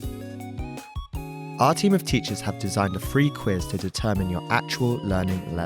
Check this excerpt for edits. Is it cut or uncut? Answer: cut